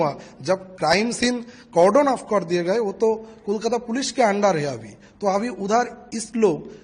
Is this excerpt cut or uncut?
uncut